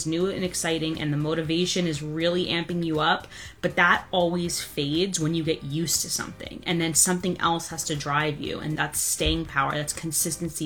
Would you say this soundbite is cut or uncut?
cut